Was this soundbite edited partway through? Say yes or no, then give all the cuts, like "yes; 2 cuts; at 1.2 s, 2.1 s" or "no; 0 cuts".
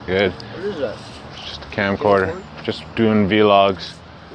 yes; 1 cut; at 3.1 s